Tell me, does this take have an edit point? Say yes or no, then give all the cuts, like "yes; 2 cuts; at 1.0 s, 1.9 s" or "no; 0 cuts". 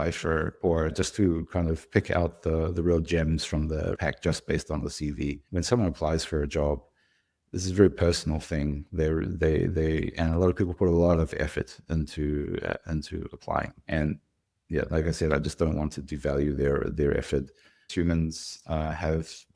yes; 4 cuts; at 0.9 s, 4.0 s, 5.4 s, 17.9 s